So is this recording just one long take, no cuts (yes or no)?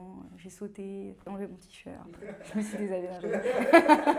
yes